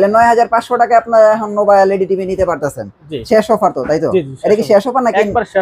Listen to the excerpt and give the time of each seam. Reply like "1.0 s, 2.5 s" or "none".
none